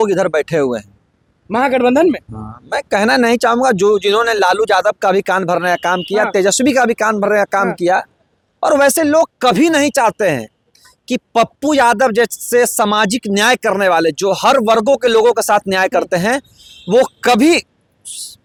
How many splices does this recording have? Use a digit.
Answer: 0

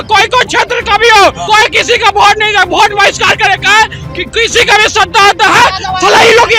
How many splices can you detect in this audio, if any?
1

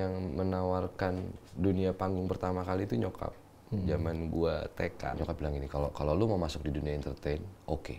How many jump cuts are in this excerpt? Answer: 1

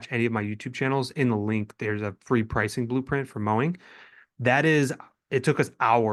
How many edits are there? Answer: 0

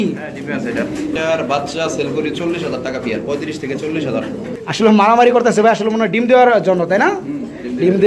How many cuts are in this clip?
2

